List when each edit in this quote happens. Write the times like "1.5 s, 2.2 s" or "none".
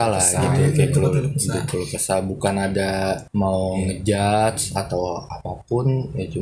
3.2 s